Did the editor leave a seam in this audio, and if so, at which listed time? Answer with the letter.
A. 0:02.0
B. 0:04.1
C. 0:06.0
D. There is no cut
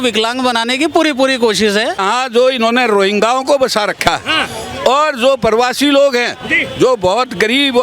A